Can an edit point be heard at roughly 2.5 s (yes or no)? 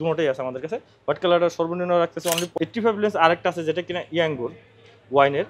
yes